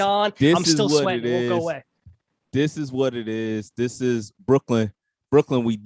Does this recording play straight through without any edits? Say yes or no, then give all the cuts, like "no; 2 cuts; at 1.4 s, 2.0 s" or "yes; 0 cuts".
yes; 0 cuts